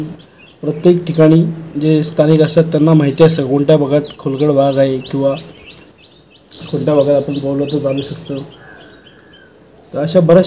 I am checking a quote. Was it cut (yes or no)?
no